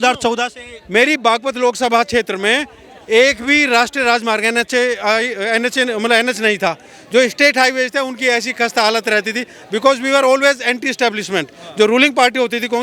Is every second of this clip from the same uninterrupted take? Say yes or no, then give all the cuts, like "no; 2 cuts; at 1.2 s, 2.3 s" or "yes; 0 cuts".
yes; 0 cuts